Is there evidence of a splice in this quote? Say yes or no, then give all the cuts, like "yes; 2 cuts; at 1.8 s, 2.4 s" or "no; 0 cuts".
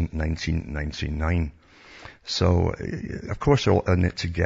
yes; 1 cut; at 2.8 s